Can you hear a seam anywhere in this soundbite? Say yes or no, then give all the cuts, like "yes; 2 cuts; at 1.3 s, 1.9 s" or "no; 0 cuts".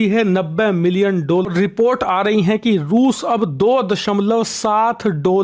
yes; 1 cut; at 1.5 s